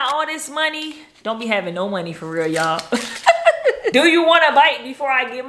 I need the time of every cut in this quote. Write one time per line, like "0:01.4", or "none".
0:03.8